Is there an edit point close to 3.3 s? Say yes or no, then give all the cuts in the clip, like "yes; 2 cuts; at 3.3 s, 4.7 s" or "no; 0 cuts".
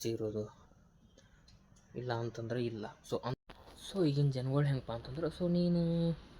yes; 1 cut; at 3.3 s